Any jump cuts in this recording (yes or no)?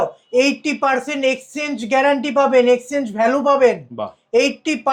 no